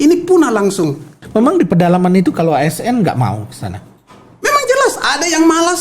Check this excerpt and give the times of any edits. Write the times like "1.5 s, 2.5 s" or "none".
1.2 s